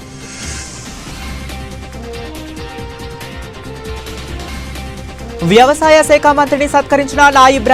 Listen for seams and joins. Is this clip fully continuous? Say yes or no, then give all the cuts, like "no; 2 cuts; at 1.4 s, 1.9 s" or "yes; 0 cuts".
yes; 0 cuts